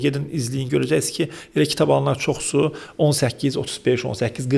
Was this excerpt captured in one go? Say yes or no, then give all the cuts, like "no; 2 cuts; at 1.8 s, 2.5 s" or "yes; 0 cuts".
yes; 0 cuts